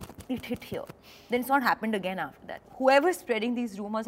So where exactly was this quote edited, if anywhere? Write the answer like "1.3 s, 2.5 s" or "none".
2.6 s

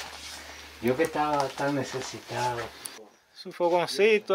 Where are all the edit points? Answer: 3.0 s

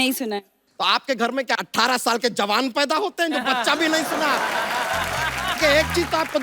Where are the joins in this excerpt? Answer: 1.6 s, 5.6 s

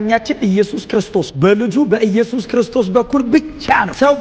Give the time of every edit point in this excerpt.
1.3 s

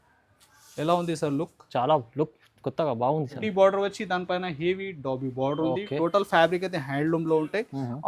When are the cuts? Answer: 3.4 s

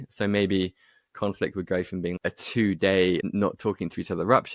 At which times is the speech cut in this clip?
2.2 s, 3.2 s

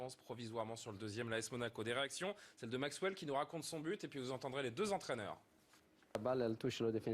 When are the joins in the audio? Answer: 3.2 s

